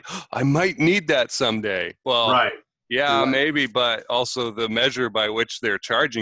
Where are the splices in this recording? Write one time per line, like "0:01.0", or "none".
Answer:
none

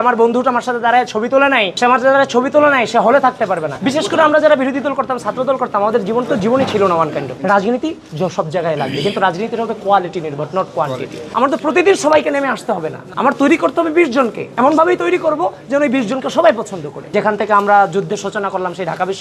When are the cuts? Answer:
0:01.7
0:03.7
0:07.3
0:11.2
0:17.0

